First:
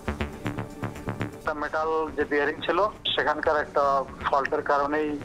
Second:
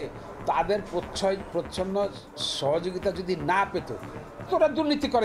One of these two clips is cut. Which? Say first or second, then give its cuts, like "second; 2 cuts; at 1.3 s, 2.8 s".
first; 1 cut; at 1.4 s